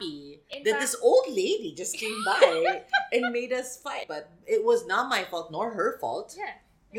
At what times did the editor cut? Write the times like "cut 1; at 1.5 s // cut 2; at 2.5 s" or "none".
cut 1; at 4.0 s